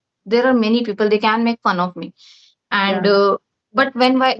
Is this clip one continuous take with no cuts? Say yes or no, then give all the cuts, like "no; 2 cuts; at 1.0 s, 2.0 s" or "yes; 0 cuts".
yes; 0 cuts